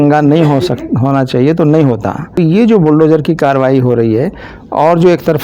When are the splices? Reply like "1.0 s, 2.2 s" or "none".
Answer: 2.4 s